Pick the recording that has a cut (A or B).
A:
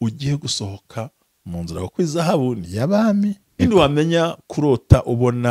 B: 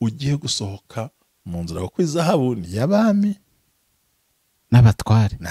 A